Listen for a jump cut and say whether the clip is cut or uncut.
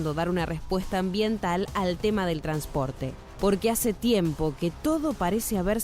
uncut